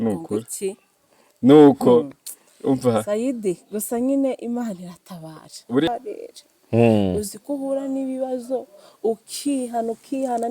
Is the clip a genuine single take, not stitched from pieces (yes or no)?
no